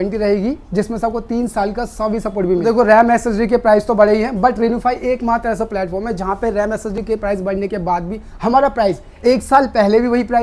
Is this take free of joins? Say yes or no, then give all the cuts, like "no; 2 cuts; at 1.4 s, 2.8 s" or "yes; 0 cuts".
no; 1 cut; at 2.6 s